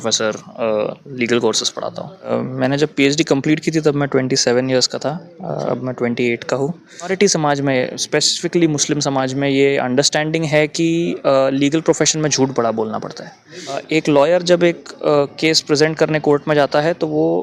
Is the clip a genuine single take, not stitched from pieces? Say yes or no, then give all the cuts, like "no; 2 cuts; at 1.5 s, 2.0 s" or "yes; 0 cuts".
no; 3 cuts; at 2.3 s, 7.1 s, 13.8 s